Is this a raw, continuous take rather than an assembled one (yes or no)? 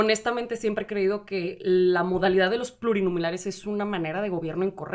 yes